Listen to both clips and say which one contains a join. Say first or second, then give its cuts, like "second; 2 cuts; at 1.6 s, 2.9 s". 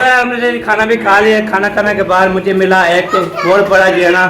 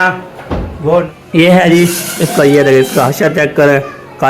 second; 1 cut; at 1.2 s